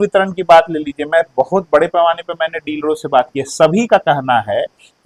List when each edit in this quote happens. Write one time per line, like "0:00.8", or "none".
none